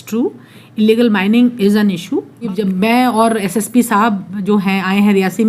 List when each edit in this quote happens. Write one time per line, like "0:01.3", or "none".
0:02.5